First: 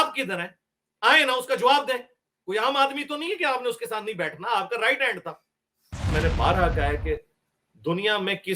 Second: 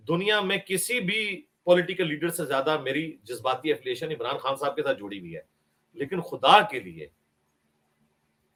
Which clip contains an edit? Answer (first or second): first